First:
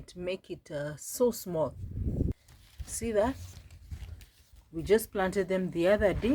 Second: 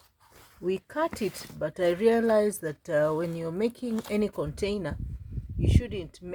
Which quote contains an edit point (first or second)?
first